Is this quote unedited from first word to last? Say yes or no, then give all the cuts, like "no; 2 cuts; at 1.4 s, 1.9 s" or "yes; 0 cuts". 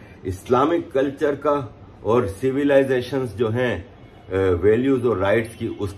yes; 0 cuts